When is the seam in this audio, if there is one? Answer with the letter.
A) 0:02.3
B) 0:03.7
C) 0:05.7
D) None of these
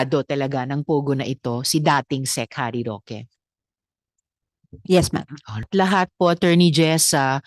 C